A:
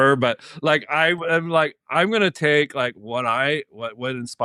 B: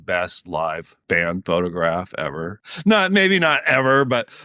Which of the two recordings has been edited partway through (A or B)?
B